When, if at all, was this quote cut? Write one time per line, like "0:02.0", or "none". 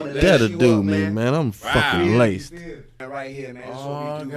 0:03.0